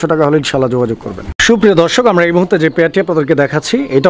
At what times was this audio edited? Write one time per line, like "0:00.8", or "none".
none